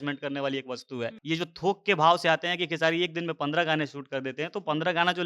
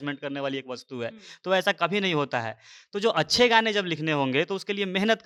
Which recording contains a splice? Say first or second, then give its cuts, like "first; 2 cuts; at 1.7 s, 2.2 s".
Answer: first; 1 cut; at 1.2 s